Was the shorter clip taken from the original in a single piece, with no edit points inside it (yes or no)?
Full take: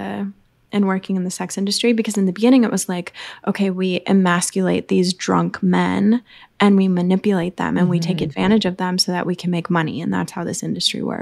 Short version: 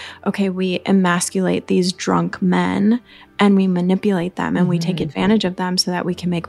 yes